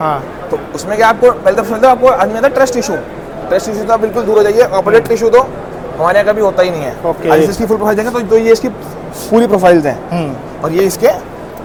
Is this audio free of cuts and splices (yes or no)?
yes